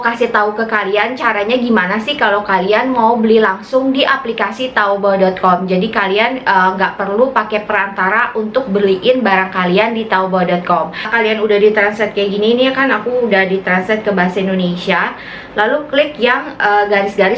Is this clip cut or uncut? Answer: cut